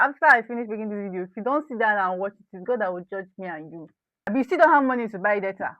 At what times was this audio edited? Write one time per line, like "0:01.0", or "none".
0:04.3